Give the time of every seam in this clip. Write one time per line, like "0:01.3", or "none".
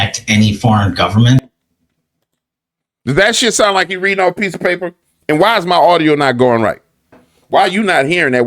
none